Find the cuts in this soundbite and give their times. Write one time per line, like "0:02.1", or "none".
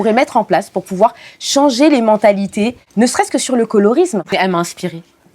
0:04.3